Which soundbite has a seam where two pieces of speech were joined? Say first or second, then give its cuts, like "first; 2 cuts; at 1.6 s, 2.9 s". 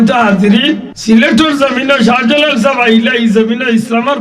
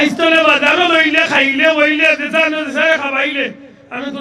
first; 1 cut; at 0.9 s